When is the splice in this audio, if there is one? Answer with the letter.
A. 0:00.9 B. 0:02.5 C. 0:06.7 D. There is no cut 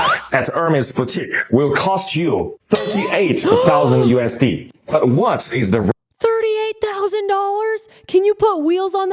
D